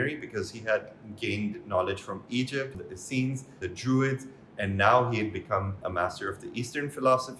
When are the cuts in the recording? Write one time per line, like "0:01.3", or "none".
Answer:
0:02.7
0:03.6
0:05.8